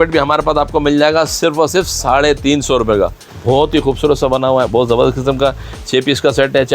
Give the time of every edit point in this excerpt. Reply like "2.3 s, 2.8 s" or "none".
3.2 s